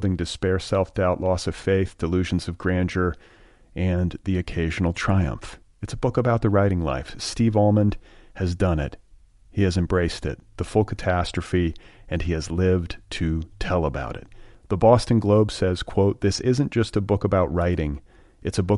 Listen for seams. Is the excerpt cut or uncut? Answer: uncut